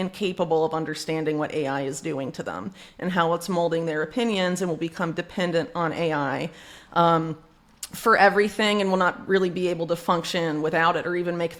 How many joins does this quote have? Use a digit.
0